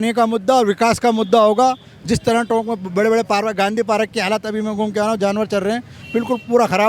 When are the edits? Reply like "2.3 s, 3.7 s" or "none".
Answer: none